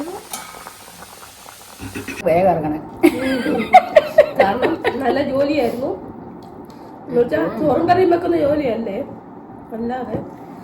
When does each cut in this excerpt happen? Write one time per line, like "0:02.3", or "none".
0:02.2